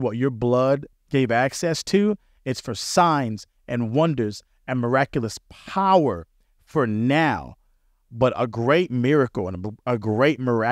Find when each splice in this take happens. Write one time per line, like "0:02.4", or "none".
none